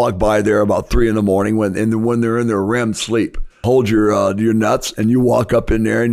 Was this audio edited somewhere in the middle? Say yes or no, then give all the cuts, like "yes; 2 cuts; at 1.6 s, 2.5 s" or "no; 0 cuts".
yes; 1 cut; at 3.6 s